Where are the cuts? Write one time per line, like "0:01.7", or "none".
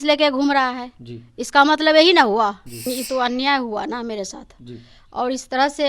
0:02.8